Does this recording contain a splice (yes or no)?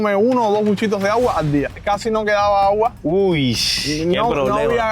yes